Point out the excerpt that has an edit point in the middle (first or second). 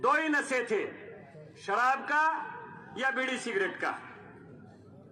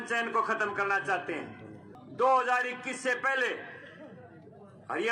second